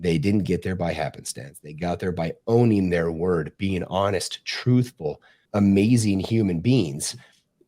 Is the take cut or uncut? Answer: cut